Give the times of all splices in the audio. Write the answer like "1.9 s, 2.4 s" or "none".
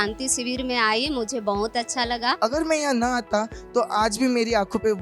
2.4 s